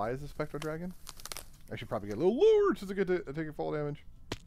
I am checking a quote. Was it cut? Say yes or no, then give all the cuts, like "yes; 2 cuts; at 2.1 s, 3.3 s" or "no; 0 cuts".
no; 0 cuts